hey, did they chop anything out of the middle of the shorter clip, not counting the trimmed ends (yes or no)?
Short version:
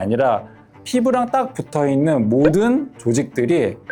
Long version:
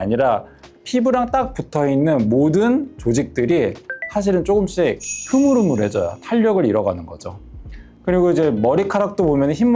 no